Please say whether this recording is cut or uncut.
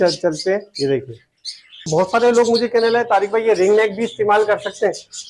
cut